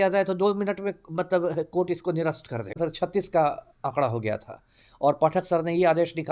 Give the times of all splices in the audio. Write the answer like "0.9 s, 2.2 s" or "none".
2.7 s